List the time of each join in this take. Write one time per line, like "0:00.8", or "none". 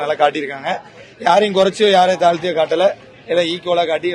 none